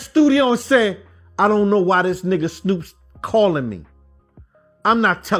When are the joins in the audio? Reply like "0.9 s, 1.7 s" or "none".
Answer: none